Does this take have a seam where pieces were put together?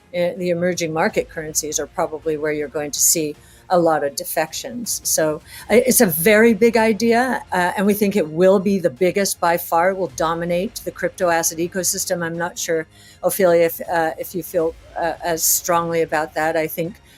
no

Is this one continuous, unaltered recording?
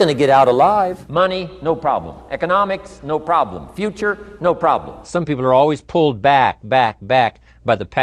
no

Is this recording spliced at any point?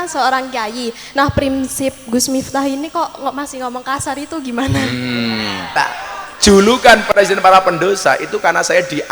yes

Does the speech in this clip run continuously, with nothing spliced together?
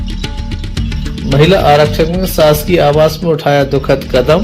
no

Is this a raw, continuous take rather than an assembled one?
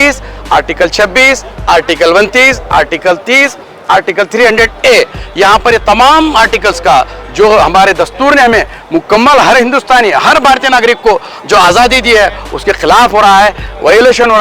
yes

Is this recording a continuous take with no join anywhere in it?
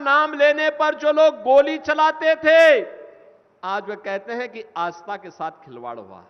yes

